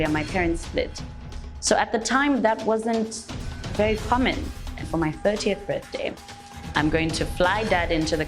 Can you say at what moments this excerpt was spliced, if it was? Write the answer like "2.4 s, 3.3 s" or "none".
4.9 s